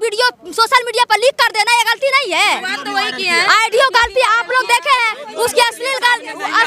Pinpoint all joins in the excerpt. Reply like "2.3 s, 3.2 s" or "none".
none